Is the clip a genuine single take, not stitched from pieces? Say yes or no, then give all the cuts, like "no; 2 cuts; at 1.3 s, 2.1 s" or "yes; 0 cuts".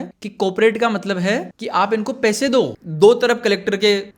no; 1 cut; at 2.8 s